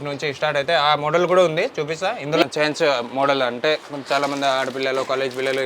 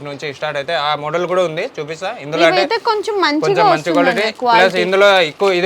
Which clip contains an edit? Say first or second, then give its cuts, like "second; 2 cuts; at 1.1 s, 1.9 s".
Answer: first; 1 cut; at 2.4 s